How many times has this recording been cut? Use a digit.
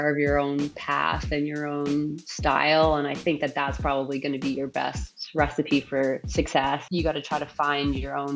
1